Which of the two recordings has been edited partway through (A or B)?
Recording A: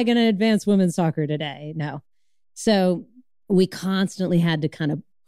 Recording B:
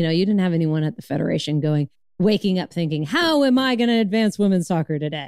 B